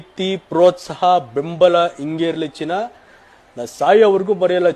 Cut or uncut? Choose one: uncut